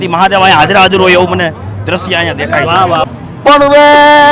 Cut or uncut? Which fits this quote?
cut